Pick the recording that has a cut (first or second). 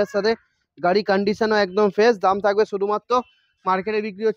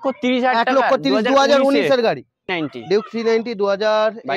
second